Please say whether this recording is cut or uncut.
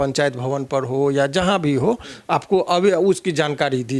uncut